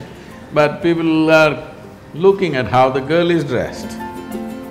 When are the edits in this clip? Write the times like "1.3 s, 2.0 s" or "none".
none